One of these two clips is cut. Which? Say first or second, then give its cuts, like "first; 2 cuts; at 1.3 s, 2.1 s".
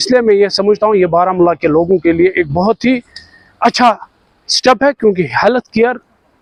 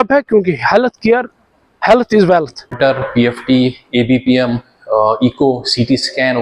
second; 1 cut; at 2.7 s